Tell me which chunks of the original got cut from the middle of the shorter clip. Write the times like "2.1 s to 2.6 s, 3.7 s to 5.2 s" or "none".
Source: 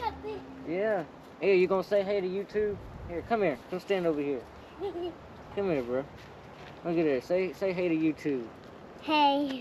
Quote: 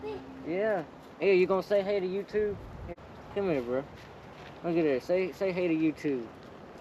3.2 s to 5.2 s

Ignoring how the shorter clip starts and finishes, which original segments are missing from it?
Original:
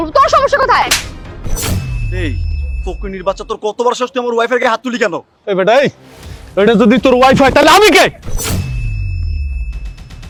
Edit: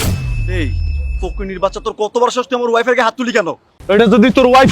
4.9 s to 6.0 s

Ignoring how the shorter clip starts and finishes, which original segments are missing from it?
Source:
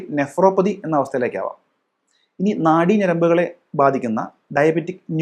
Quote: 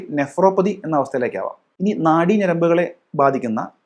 1.6 s to 2.2 s

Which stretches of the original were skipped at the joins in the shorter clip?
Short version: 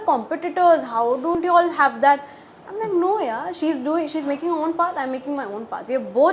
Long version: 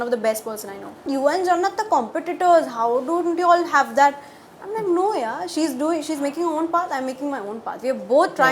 3.2 s to 3.3 s

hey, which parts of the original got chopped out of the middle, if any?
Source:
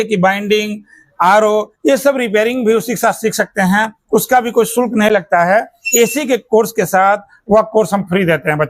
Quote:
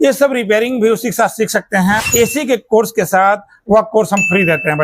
3.9 s to 5.9 s

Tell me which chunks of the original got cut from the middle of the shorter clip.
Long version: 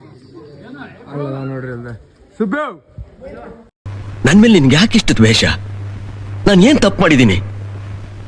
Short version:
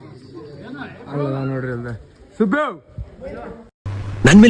none

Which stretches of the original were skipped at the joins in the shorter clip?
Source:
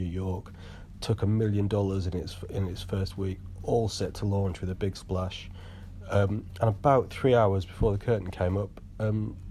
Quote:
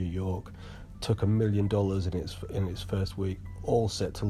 none

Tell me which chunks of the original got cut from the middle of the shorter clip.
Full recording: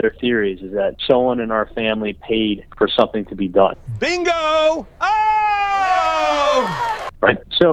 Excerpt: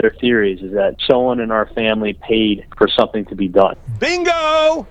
none

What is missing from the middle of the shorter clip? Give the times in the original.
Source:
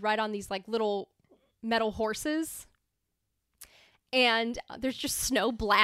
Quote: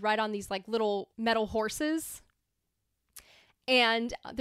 1.1 s to 1.6 s

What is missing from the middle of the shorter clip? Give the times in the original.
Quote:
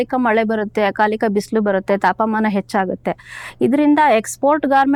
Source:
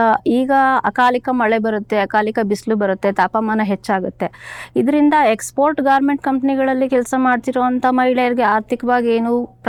none

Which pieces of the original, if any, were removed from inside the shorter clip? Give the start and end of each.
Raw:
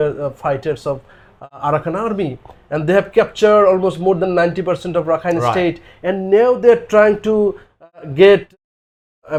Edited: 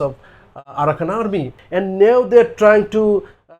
2.4 s to 5.9 s

